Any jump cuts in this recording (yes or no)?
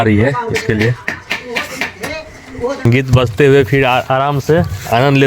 yes